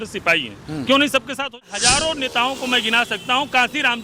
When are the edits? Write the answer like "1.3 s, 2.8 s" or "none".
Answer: 1.4 s